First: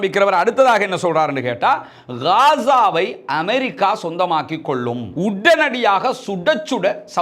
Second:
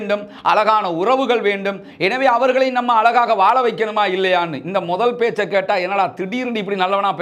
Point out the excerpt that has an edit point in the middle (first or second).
first